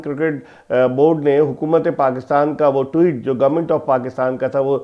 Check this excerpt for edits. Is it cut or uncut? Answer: uncut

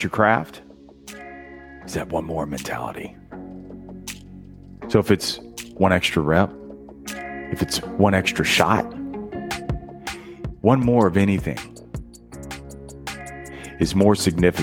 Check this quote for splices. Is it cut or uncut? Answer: cut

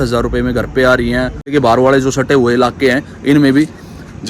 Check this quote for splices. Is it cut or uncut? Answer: cut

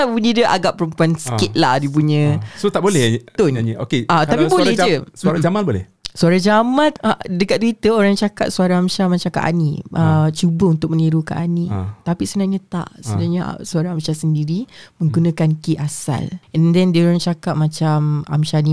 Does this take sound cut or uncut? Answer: cut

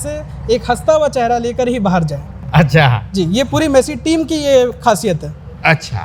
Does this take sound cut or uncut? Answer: uncut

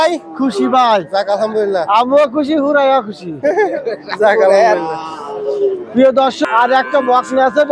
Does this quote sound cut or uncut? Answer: uncut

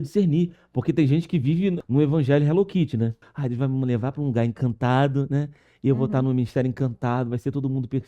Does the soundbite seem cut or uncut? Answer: cut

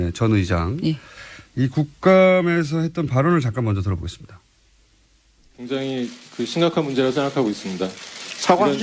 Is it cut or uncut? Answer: uncut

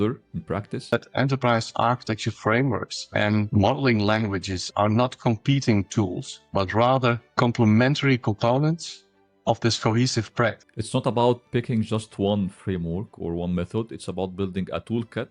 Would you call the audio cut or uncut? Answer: cut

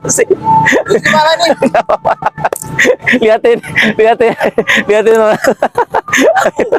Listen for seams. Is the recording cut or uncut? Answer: uncut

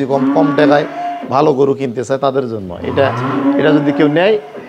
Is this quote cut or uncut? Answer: uncut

